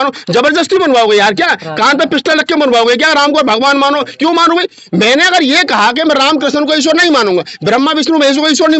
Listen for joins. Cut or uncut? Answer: uncut